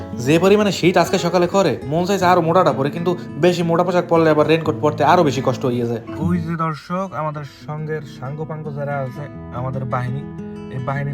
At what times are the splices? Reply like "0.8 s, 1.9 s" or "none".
6.1 s